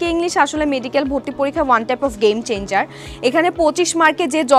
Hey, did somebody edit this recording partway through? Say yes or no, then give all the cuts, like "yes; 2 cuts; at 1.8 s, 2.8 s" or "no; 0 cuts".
no; 0 cuts